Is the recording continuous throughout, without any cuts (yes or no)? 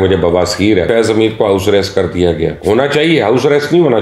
no